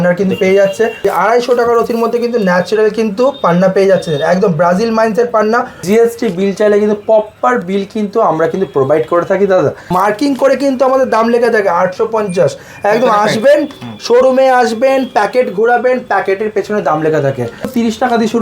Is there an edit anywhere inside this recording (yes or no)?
yes